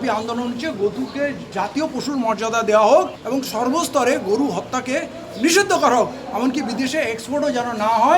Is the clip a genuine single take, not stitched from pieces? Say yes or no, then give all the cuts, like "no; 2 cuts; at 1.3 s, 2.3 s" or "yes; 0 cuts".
no; 2 cuts; at 1.4 s, 3.2 s